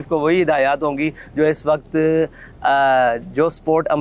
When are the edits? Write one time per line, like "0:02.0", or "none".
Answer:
none